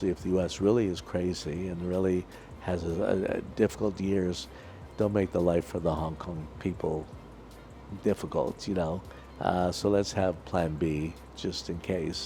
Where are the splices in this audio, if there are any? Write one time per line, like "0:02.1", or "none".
none